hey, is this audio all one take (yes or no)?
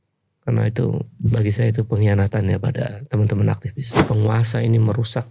no